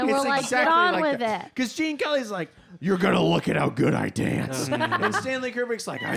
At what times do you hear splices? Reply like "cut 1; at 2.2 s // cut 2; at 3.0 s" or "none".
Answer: none